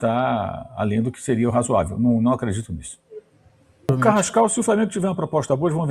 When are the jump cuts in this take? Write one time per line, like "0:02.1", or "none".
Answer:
0:03.9